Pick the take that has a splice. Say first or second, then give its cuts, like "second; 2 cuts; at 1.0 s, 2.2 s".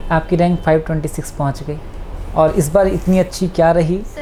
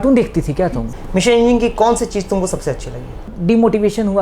second; 2 cuts; at 0.9 s, 3.3 s